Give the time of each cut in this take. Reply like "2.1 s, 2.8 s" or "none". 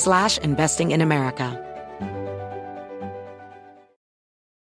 1.5 s